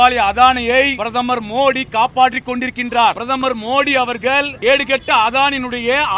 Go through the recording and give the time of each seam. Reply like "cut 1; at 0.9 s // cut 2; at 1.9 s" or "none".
cut 1; at 1.0 s // cut 2; at 3.2 s // cut 3; at 4.5 s